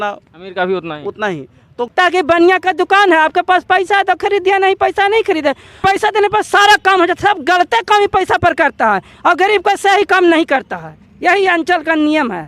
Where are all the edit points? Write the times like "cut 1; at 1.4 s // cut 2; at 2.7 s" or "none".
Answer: cut 1; at 1.9 s // cut 2; at 5.8 s